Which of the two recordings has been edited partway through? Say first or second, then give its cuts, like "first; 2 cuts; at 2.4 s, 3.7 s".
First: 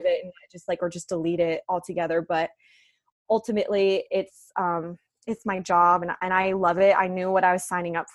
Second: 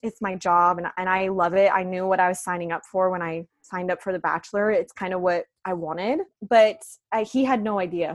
second; 1 cut; at 6.3 s